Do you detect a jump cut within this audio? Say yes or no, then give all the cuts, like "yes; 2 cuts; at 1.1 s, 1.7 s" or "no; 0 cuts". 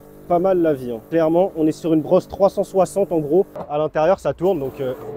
yes; 2 cuts; at 0.9 s, 3.6 s